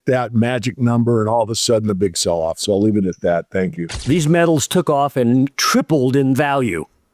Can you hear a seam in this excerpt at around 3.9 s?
yes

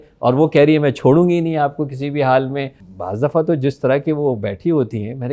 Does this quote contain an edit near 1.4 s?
no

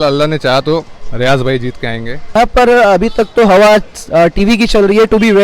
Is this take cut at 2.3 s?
yes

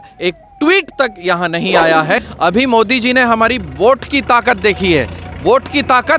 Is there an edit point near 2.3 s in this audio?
yes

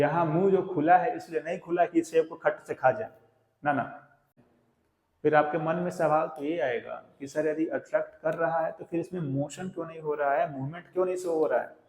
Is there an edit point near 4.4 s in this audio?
yes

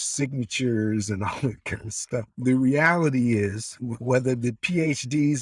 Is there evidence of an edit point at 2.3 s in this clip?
yes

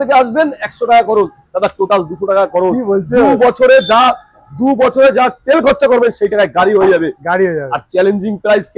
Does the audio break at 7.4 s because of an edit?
no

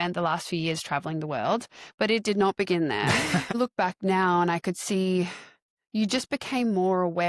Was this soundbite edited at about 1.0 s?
no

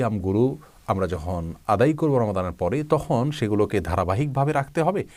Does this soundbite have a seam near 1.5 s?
no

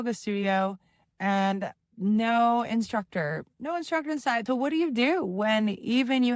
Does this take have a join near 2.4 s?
no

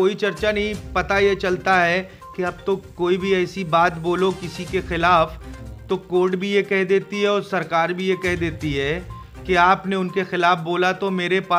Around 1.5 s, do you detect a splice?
no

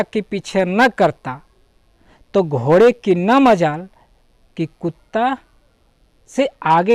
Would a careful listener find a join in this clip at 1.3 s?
no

